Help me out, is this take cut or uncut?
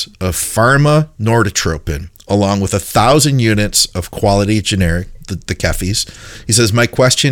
uncut